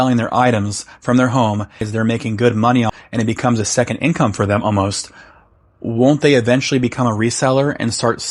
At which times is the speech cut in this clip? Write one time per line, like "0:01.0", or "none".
0:01.9